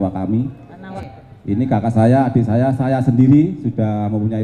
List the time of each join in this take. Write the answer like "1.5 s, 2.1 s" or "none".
0.9 s